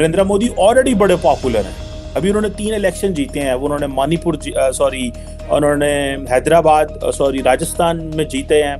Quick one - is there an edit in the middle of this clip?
no; 0 cuts

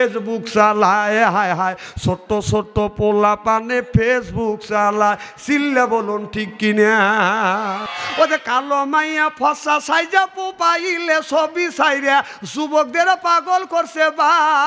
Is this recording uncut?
no; 1 cut; at 7.9 s

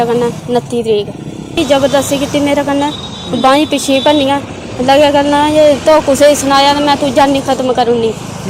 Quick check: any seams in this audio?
yes; 1 cut; at 1.5 s

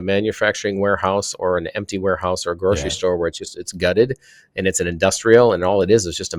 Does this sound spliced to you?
no; 0 cuts

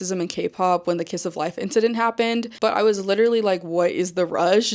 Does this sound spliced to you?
no; 0 cuts

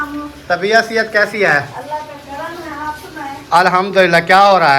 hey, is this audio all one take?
yes; 0 cuts

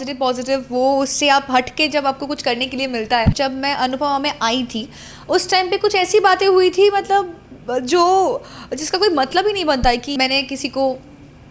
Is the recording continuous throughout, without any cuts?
no; 2 cuts; at 3.4 s, 10.1 s

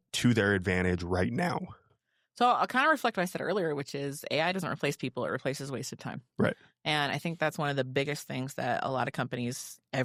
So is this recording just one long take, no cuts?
yes; 0 cuts

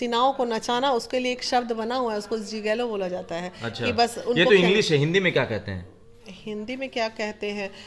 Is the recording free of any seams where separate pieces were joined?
yes; 0 cuts

